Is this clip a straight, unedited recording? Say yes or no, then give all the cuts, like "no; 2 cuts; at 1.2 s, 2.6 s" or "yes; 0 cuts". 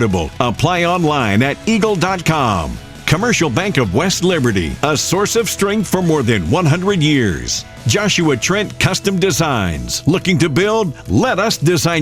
yes; 0 cuts